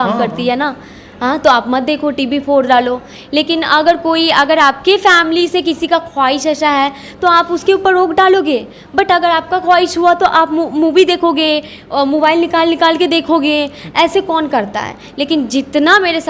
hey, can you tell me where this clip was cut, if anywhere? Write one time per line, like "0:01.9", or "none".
none